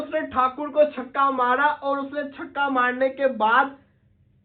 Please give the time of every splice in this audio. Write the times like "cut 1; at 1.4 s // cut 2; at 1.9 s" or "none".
none

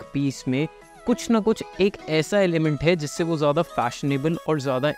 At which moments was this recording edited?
none

